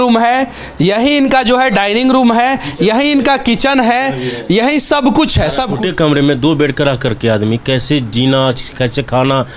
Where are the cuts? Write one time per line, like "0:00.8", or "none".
0:05.7

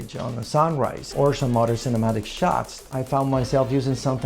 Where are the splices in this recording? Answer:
0:01.0
0:02.8

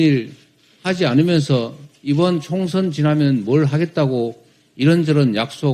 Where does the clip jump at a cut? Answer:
none

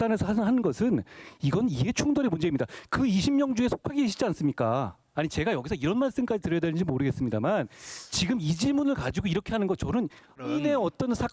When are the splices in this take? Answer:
0:05.0
0:10.4

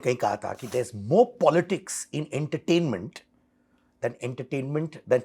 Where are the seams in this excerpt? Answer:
none

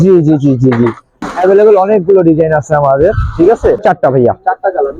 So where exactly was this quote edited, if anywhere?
0:01.1
0:03.8

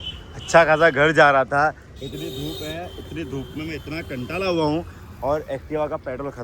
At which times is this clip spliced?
none

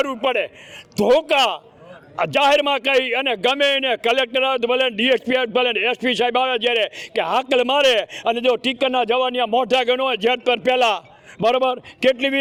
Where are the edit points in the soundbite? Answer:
none

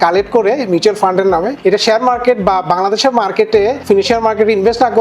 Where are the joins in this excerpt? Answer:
0:01.5
0:03.8

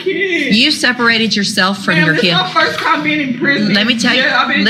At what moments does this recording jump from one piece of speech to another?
none

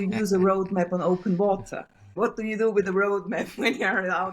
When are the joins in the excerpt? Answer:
0:02.0

